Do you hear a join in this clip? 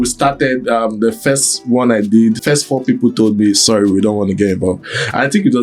yes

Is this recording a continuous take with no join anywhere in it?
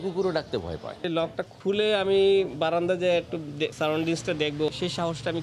no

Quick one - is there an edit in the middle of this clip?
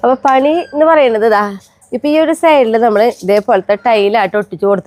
no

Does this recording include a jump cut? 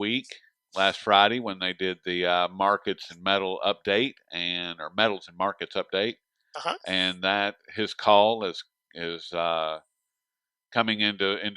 yes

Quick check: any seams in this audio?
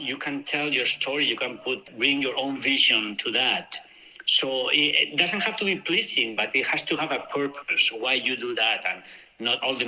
yes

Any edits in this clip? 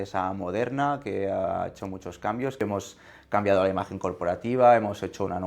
yes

